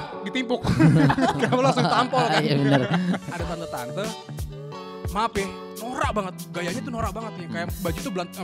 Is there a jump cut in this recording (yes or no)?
yes